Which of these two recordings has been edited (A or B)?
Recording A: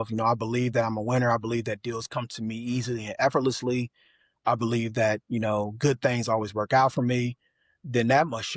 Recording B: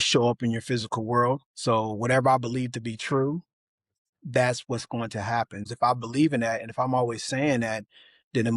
B